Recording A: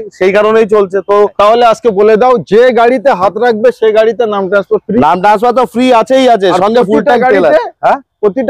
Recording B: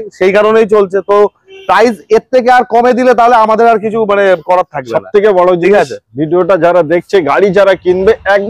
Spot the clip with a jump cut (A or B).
A